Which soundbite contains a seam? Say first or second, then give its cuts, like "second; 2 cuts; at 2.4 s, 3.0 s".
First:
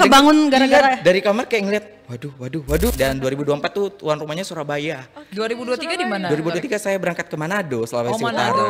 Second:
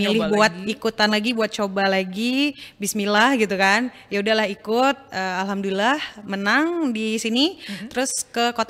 first; 1 cut; at 2.9 s